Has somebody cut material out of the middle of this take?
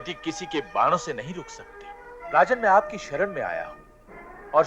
yes; 1 cut; at 2.2 s

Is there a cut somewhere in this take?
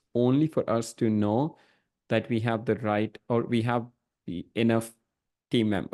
no; 0 cuts

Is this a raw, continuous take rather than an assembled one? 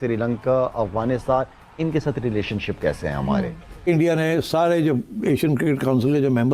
no; 1 cut; at 3.9 s

